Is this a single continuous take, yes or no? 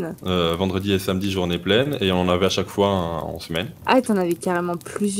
no